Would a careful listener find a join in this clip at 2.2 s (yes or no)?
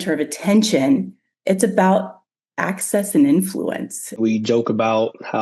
no